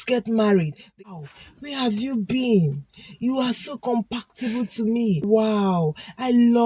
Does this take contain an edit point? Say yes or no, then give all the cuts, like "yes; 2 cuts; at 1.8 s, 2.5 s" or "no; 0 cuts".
yes; 2 cuts; at 1.0 s, 5.3 s